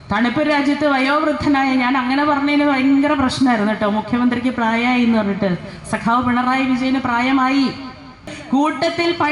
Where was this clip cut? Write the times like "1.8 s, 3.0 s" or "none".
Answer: 8.3 s